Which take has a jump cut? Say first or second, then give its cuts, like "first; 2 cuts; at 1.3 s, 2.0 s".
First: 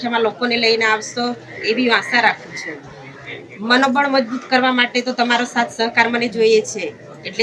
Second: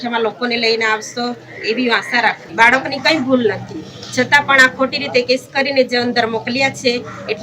second; 1 cut; at 2.4 s